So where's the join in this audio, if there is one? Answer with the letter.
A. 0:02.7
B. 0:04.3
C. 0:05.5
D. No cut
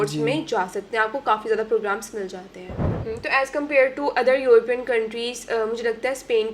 A